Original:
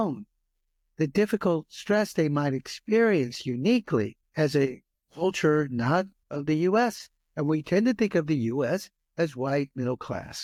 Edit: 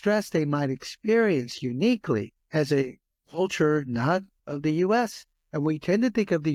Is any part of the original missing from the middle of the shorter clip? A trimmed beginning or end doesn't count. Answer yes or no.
no